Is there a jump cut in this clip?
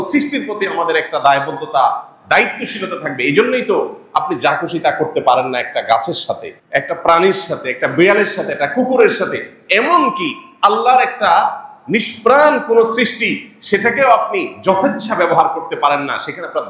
no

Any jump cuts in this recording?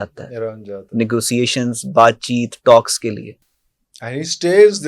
no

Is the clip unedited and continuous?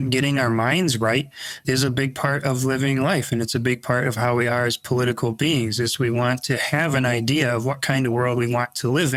yes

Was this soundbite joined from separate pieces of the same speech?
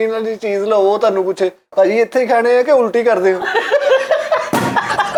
no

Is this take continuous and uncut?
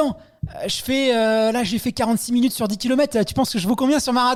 yes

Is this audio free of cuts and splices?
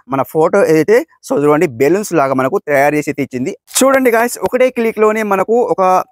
no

